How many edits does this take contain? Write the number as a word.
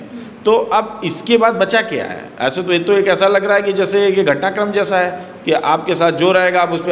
zero